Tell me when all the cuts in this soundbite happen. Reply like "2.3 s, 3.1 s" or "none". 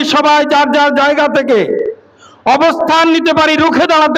none